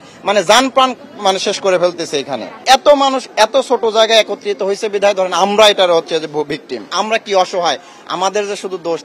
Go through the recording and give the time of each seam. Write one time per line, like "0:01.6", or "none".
0:02.6
0:06.8